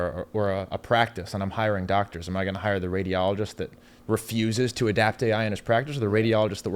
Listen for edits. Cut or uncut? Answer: uncut